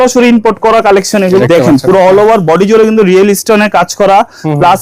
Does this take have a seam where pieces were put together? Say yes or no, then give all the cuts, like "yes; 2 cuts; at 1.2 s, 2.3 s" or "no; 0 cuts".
yes; 1 cut; at 1.4 s